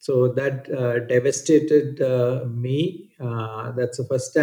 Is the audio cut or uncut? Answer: uncut